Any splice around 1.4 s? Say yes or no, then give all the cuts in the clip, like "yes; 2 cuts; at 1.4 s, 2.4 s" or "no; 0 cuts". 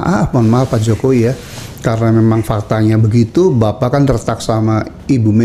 no; 0 cuts